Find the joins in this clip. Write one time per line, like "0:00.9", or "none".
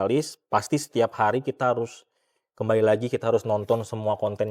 none